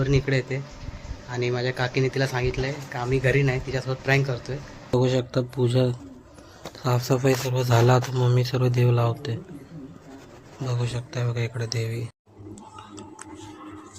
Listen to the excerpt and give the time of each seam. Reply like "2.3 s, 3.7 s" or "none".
4.9 s, 12.1 s